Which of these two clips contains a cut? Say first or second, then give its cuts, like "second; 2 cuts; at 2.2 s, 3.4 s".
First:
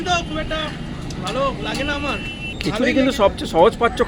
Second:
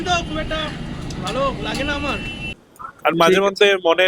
second; 1 cut; at 2.4 s